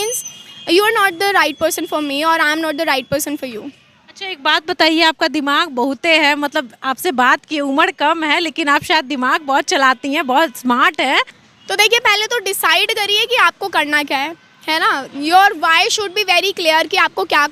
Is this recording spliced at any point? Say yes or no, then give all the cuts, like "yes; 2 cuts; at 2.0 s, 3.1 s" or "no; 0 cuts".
no; 0 cuts